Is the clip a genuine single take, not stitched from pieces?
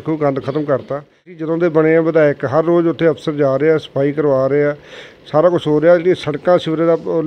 no; 1 cut; at 1.4 s

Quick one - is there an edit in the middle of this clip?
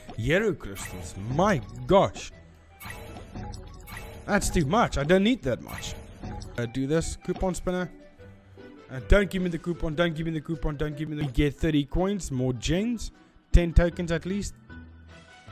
yes; 2 cuts; at 6.6 s, 11.3 s

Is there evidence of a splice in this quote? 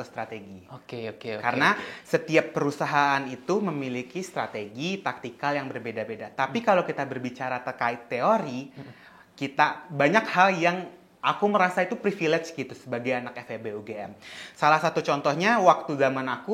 no; 0 cuts

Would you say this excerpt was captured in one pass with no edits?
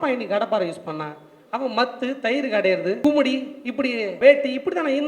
no; 2 cuts; at 3.0 s, 4.2 s

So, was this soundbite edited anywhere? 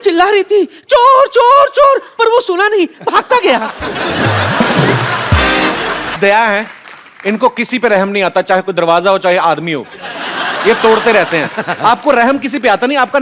yes; 1 cut; at 6.2 s

